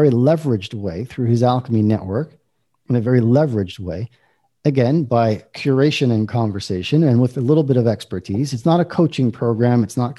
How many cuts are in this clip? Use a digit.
0